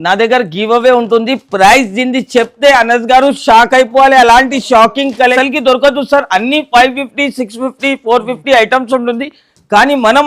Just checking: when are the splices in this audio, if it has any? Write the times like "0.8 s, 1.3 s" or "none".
5.3 s